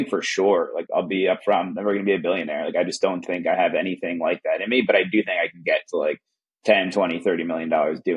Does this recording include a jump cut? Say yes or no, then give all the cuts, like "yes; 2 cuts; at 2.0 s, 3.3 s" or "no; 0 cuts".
no; 0 cuts